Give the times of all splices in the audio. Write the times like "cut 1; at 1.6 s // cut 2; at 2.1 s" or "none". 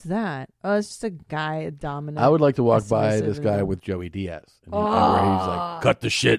none